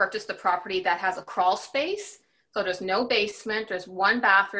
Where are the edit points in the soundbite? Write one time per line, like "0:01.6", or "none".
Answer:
0:01.3